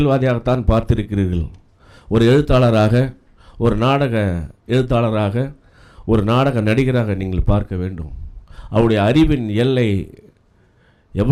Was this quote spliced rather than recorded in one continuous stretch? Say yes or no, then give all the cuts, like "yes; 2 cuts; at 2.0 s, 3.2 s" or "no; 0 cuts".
no; 0 cuts